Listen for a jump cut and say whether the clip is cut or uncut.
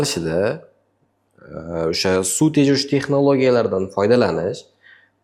uncut